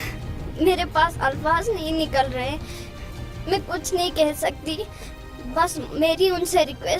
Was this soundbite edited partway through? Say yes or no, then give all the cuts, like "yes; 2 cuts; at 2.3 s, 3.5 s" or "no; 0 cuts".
no; 0 cuts